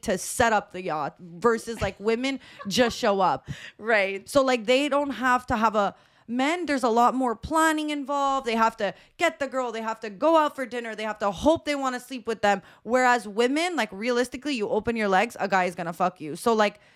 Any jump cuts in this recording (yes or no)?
no